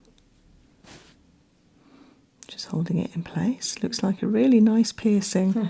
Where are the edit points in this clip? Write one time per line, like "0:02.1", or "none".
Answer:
none